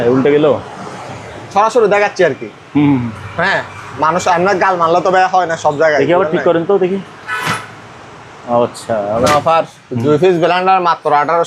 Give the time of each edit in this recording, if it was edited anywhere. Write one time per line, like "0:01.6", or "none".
0:09.3